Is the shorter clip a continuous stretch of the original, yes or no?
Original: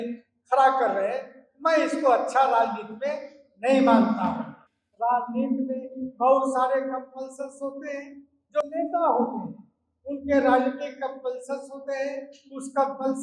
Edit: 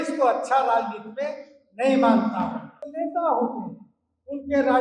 no